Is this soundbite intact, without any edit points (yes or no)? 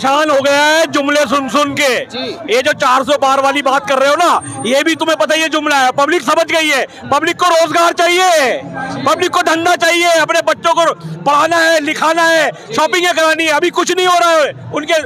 yes